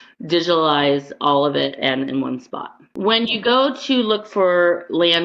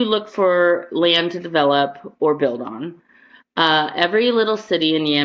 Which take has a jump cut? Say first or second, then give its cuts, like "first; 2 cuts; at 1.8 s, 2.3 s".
first; 1 cut; at 2.8 s